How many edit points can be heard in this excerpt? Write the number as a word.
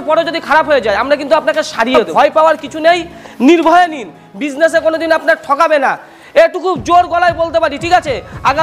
one